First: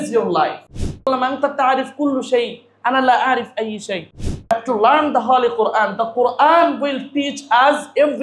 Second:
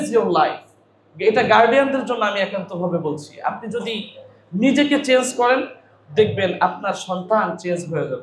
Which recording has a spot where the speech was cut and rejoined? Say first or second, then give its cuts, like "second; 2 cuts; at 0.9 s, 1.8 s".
first; 2 cuts; at 1.1 s, 4.5 s